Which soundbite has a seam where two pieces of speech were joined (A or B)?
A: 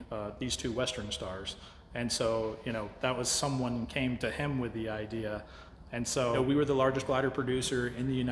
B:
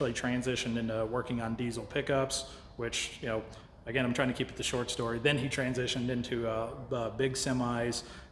A